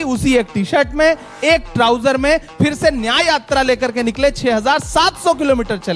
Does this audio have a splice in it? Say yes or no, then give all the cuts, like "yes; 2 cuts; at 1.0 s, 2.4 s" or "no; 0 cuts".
no; 0 cuts